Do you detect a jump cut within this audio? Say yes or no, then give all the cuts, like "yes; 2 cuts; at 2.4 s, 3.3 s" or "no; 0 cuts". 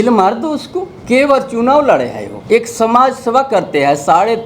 yes; 2 cuts; at 0.9 s, 2.3 s